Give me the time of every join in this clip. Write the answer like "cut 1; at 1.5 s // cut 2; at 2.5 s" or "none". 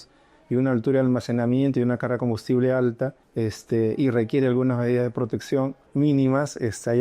cut 1; at 3.2 s // cut 2; at 5.8 s